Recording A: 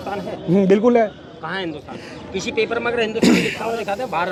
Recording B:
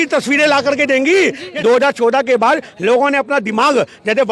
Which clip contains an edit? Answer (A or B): B